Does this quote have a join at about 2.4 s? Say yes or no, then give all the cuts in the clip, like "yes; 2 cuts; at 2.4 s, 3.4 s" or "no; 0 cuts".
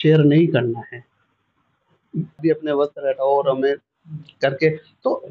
yes; 1 cut; at 2.4 s